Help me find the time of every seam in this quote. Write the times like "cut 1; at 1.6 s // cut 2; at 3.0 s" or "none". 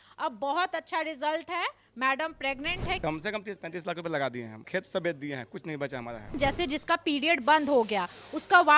cut 1; at 3.0 s // cut 2; at 4.6 s // cut 3; at 6.3 s